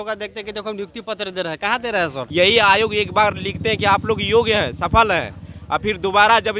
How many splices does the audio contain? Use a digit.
1